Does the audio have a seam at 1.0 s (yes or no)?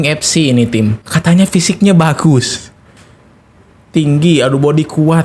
yes